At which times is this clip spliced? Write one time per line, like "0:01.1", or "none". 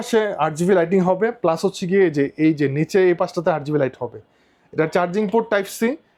none